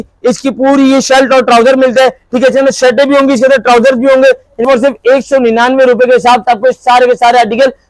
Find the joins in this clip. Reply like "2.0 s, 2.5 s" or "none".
4.6 s